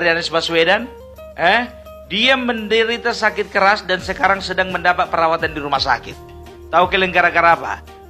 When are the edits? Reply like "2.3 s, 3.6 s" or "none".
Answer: none